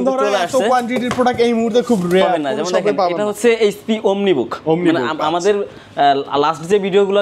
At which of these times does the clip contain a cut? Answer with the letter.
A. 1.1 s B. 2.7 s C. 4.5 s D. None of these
D